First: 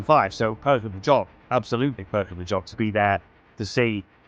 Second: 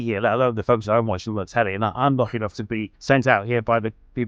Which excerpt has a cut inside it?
second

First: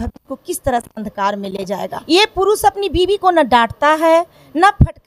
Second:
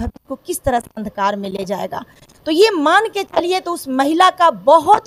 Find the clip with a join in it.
first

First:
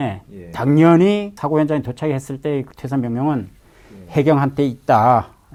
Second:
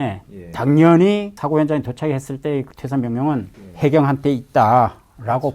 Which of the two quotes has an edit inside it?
second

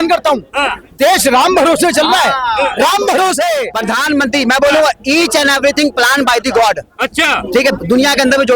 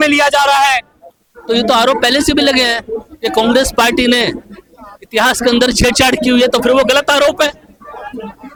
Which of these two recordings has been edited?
first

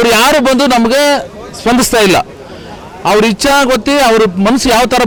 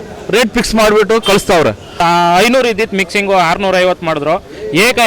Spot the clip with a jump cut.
second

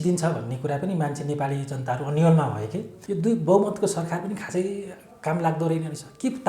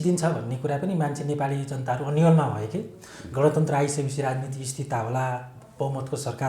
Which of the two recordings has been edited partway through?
first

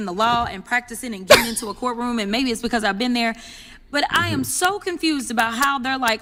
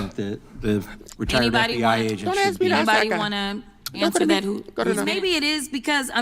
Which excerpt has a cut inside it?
second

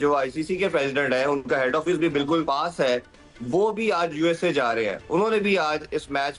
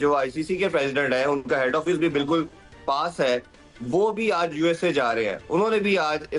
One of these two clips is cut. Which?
first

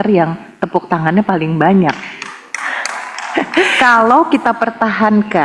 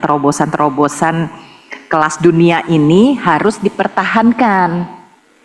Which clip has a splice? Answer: first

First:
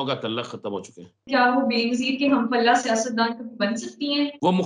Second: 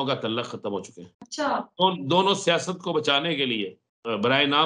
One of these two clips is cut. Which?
first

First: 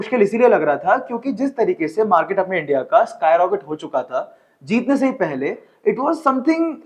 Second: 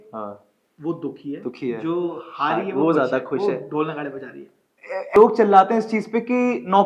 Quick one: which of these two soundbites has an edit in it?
second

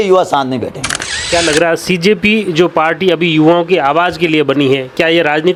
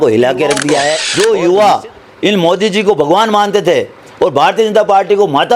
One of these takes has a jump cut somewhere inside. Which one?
second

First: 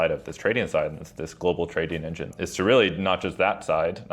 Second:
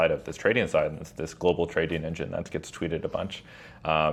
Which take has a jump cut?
first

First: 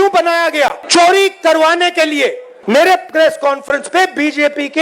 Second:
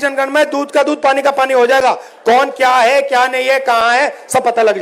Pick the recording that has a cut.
first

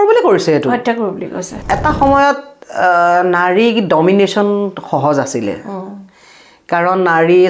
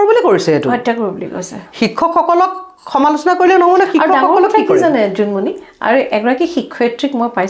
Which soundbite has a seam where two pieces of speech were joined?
first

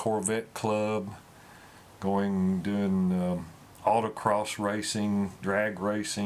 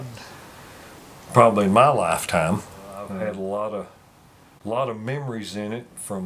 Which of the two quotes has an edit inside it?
second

